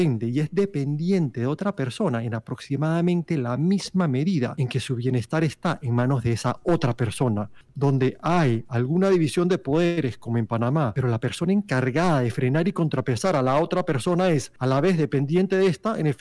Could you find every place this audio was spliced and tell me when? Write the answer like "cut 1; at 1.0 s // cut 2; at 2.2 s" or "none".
cut 1; at 4.6 s // cut 2; at 7.6 s // cut 3; at 10.9 s // cut 4; at 14.5 s

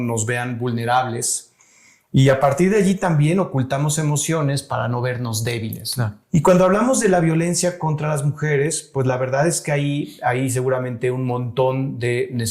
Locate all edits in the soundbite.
cut 1; at 6.2 s

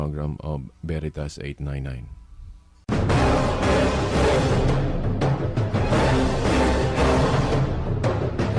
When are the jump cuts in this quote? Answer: cut 1; at 2.8 s

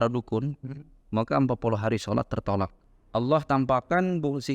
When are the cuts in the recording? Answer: cut 1; at 2.8 s

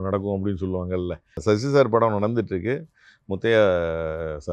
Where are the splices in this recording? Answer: cut 1; at 1.4 s

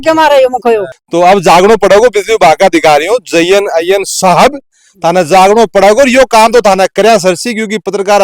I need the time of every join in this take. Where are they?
cut 1; at 1.0 s

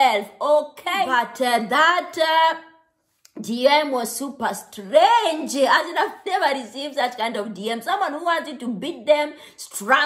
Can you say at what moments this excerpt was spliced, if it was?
cut 1; at 1.1 s

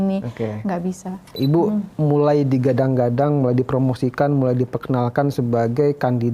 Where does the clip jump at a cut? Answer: cut 1; at 1.3 s

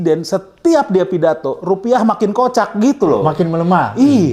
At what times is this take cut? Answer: none

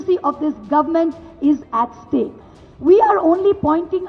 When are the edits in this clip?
cut 1; at 2.4 s

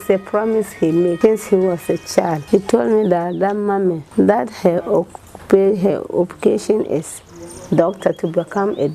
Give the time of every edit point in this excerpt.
cut 1; at 1.2 s // cut 2; at 2.4 s // cut 3; at 4.0 s

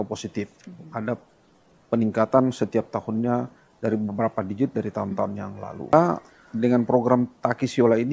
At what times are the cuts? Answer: cut 1; at 5.9 s

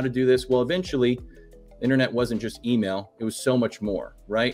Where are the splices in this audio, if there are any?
none

